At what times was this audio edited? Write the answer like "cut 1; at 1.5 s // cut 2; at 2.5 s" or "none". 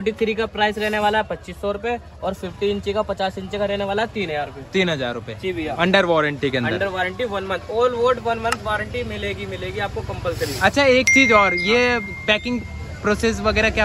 none